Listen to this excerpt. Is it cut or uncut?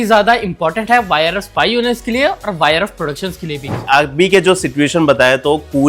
cut